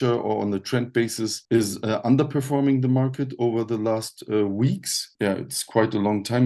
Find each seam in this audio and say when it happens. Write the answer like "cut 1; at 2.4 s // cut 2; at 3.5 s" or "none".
cut 1; at 5.1 s